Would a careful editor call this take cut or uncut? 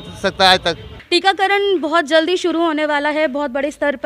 cut